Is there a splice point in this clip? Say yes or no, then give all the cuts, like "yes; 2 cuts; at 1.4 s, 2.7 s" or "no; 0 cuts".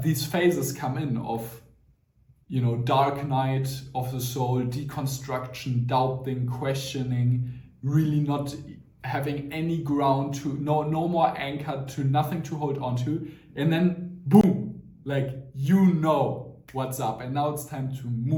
no; 0 cuts